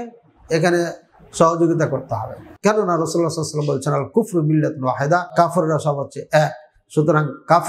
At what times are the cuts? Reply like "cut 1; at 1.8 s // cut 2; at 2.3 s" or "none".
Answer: cut 1; at 2.4 s // cut 2; at 5.3 s